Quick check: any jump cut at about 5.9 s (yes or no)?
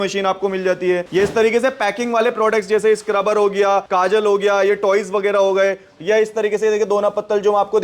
no